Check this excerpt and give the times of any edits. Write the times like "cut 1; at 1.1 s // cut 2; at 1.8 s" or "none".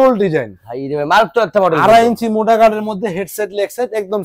none